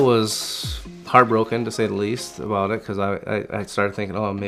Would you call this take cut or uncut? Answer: uncut